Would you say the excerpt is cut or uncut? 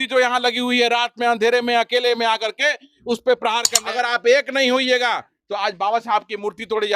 cut